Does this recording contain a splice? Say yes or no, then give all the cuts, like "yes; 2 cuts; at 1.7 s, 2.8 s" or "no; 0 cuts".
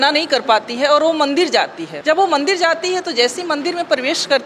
yes; 1 cut; at 1.8 s